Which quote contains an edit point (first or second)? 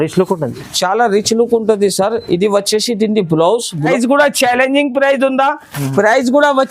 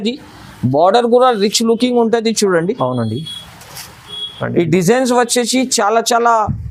first